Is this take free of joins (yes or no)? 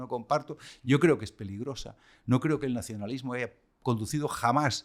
yes